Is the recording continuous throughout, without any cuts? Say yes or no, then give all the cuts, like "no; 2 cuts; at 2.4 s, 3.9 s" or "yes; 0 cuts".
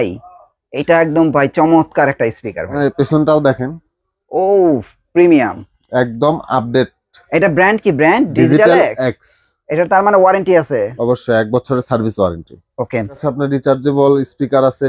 yes; 0 cuts